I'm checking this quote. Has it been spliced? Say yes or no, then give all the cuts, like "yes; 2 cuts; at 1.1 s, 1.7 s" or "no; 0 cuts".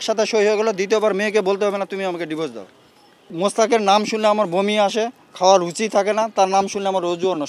yes; 1 cut; at 3.2 s